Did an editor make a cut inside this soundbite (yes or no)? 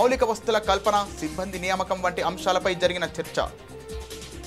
no